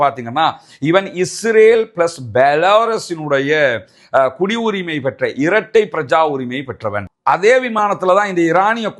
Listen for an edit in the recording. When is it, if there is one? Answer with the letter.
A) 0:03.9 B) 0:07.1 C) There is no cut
B